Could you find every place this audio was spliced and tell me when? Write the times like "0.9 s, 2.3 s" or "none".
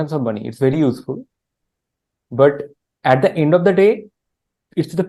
none